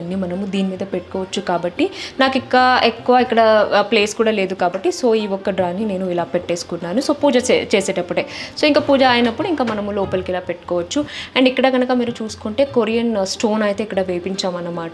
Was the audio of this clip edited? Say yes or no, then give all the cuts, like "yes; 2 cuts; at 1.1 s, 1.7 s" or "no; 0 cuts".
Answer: no; 0 cuts